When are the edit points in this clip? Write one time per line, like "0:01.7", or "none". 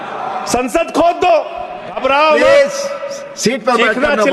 0:02.0